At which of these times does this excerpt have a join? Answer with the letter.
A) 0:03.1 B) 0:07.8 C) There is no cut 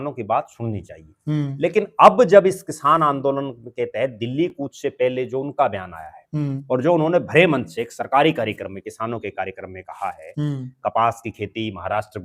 C